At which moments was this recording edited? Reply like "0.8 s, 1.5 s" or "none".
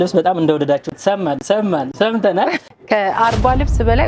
2.6 s